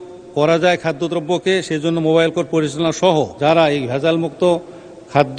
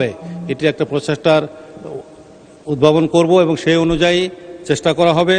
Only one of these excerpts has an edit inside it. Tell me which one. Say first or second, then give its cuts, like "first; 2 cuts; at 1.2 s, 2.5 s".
first; 1 cut; at 3.3 s